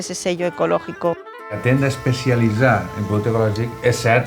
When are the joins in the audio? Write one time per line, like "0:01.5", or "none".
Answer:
0:01.6